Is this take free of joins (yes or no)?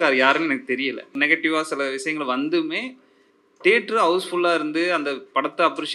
no